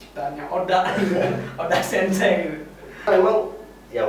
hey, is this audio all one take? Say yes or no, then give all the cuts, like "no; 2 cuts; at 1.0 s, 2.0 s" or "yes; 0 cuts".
no; 1 cut; at 3.1 s